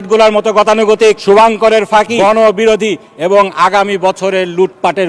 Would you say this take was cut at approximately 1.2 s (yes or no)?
yes